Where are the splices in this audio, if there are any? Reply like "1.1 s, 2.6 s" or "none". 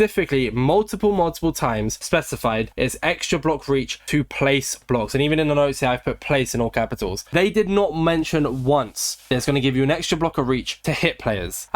none